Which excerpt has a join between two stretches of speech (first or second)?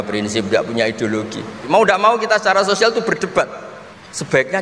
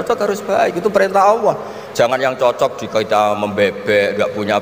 first